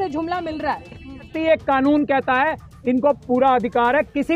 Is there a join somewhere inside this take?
yes; 1 cut; at 1.3 s

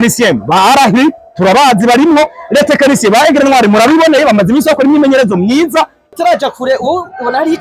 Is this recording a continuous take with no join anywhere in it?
no; 1 cut; at 6.0 s

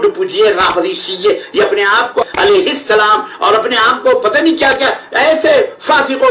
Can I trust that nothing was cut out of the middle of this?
no; 1 cut; at 2.2 s

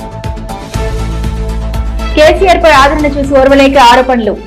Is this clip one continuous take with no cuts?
yes; 0 cuts

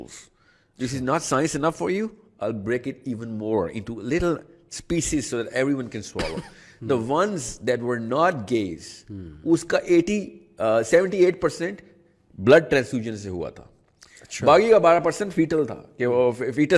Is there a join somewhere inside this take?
no; 0 cuts

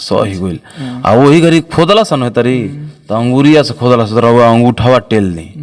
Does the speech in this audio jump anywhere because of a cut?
no; 0 cuts

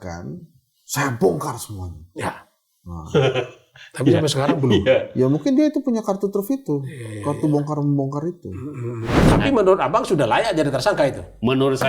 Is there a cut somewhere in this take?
yes; 1 cut; at 9.2 s

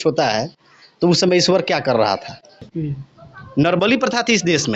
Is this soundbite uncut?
no; 1 cut; at 2.7 s

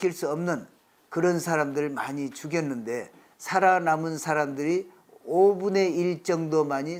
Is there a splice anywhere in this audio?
no; 0 cuts

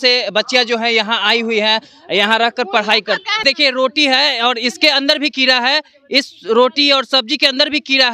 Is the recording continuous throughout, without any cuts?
no; 1 cut; at 3.4 s

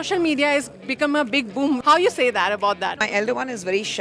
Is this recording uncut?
no; 2 cuts; at 1.8 s, 3.0 s

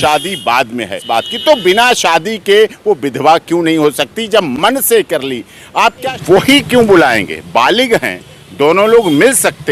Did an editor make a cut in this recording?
yes; 2 cuts; at 1.0 s, 6.0 s

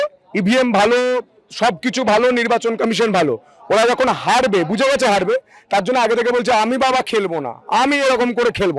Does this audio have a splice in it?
no; 0 cuts

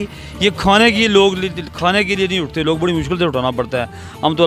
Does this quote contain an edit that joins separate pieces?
no; 0 cuts

